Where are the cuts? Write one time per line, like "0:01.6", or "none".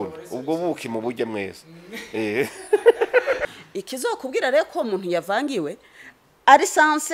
0:03.6

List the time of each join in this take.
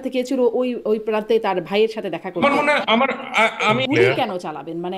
0:03.7

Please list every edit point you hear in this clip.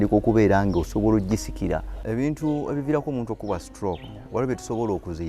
0:02.0

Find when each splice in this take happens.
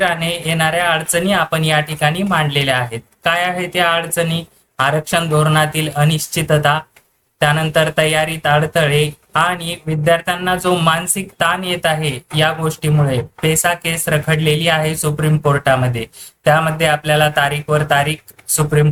none

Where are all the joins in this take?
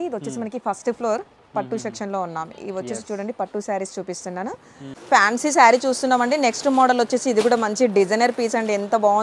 0:04.9

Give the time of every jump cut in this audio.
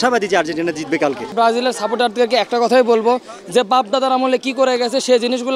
0:01.3

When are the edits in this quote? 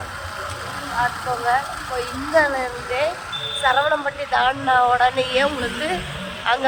none

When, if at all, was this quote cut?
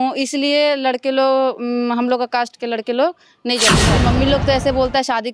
0:03.9

